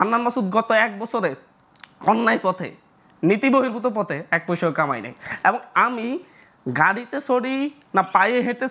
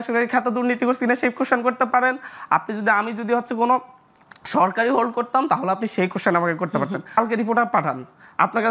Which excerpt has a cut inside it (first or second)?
second